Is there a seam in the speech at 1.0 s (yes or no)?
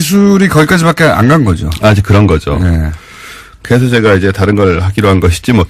yes